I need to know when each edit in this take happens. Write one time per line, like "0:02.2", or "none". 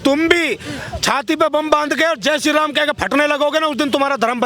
none